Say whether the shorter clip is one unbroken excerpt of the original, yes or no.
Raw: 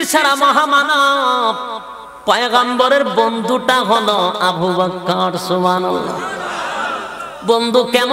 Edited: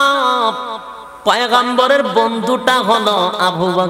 yes